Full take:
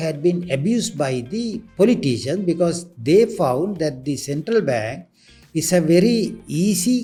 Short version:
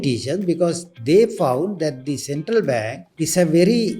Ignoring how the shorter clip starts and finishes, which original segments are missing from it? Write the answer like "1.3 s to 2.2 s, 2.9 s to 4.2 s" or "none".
5.0 s to 5.4 s